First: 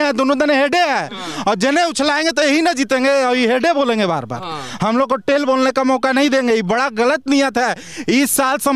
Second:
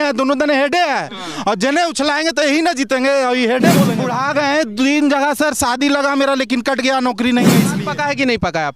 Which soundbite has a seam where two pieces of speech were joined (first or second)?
second